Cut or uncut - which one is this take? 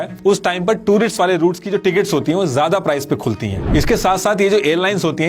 cut